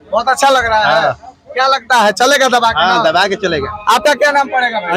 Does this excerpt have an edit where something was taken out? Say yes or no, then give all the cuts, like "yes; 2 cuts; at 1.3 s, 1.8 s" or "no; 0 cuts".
no; 0 cuts